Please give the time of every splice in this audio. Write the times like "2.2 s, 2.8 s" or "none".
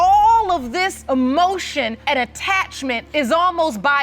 1.0 s, 2.0 s, 3.0 s